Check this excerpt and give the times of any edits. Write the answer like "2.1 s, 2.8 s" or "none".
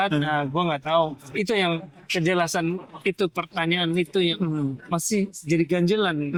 none

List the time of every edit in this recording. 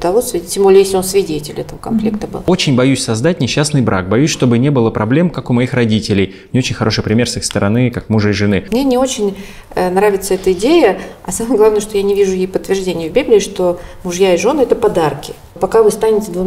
2.4 s, 8.7 s, 15.6 s

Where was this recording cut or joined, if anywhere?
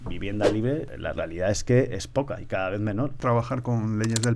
0.9 s, 3.2 s

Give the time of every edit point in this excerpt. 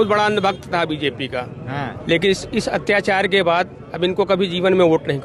none

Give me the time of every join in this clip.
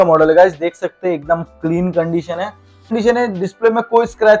2.9 s

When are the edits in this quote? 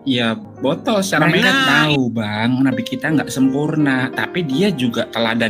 1.6 s

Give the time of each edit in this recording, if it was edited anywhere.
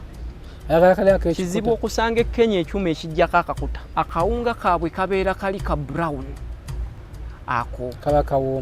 3.7 s

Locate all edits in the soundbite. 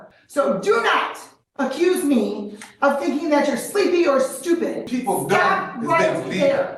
4.9 s

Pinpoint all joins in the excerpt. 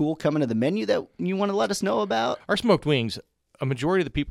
2.4 s

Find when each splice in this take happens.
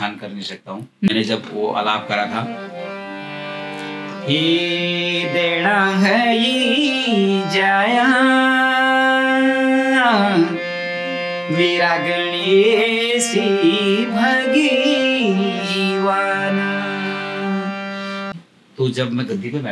1.1 s, 18.3 s

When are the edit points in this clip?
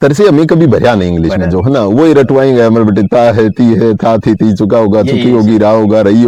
none

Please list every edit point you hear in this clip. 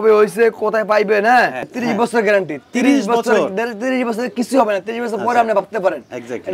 1.7 s

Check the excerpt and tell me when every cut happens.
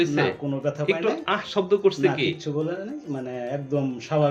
none

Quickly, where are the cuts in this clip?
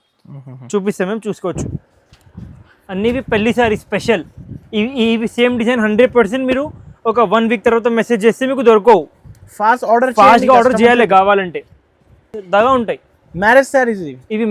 1.6 s

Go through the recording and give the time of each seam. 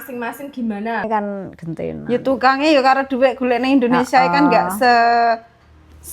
1.1 s

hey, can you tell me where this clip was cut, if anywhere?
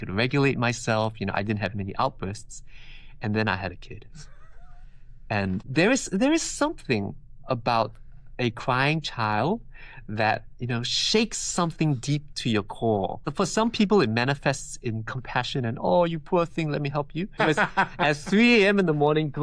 5.7 s, 13.2 s, 17.4 s

